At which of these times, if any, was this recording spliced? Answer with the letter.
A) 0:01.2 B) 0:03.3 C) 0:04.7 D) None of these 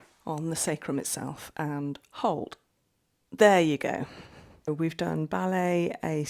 C